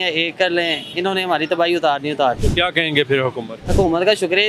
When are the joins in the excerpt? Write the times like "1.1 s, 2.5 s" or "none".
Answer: 2.4 s, 3.5 s